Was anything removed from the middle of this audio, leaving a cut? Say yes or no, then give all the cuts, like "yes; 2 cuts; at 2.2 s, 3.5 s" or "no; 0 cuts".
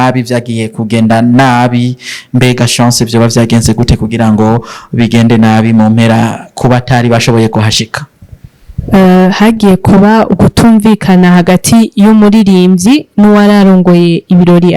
no; 0 cuts